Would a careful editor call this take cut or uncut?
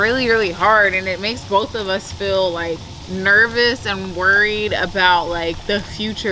uncut